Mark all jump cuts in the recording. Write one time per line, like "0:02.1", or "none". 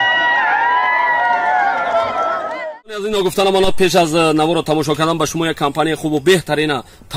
0:02.5